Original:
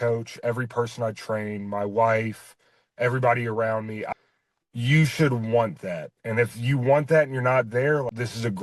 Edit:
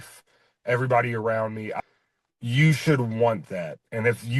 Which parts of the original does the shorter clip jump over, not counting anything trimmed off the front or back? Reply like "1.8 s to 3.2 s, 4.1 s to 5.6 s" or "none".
none

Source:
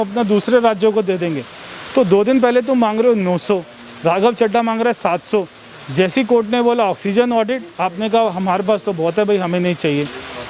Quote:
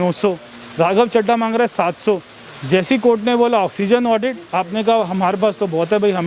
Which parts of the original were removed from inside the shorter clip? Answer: none

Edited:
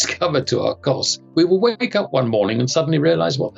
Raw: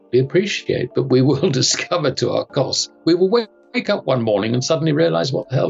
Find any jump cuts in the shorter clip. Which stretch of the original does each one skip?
3.5 s to 3.8 s

